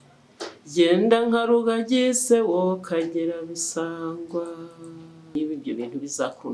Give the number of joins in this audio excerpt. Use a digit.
1